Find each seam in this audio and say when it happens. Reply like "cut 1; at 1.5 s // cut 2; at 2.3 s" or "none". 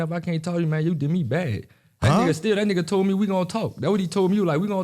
none